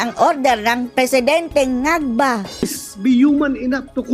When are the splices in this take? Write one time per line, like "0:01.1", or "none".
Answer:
0:02.8